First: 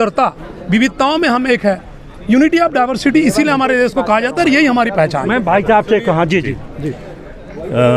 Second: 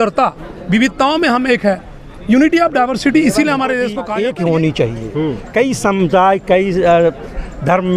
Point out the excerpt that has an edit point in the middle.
second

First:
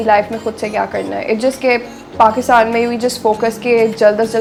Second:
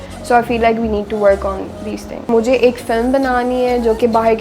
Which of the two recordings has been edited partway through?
second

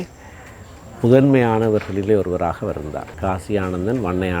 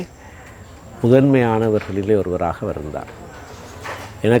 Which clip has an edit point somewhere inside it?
first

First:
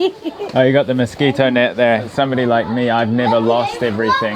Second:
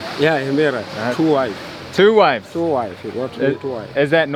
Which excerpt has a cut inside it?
first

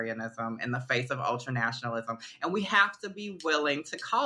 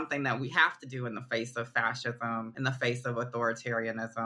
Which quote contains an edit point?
second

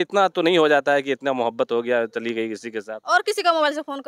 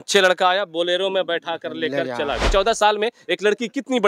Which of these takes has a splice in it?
second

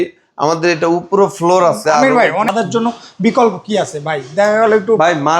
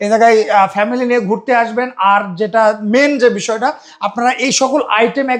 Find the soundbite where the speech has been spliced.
first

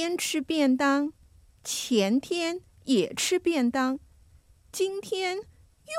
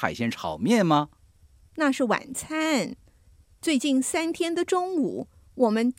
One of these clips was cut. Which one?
second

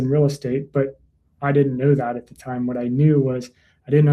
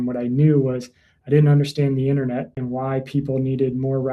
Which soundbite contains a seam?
second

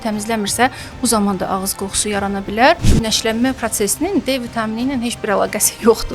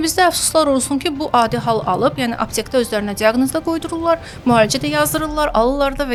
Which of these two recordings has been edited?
first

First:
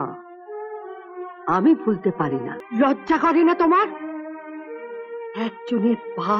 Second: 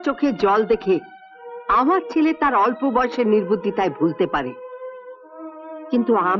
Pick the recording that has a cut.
first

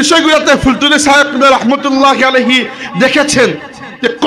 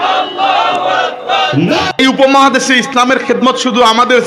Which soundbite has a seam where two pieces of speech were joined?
second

